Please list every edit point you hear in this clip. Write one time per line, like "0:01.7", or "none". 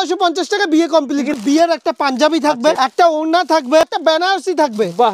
0:01.3
0:02.8
0:03.9